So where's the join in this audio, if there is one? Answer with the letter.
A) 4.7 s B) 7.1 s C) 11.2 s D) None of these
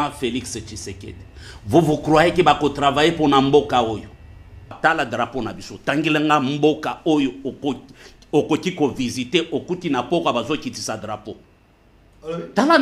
A